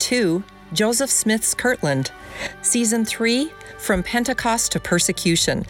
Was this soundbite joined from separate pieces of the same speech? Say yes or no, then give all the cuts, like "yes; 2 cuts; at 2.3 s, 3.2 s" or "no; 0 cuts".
no; 0 cuts